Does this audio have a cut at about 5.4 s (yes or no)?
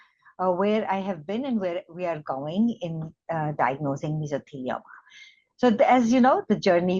no